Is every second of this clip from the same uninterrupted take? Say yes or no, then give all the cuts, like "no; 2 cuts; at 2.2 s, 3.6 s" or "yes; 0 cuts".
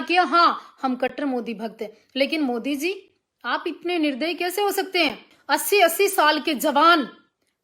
no; 1 cut; at 5.3 s